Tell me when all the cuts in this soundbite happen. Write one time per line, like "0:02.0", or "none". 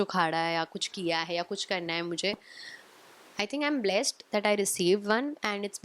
none